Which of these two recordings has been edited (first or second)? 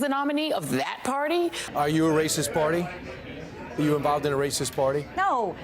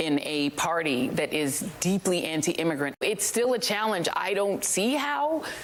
first